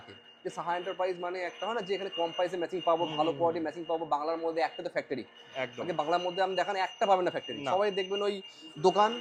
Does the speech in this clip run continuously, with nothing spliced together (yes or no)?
yes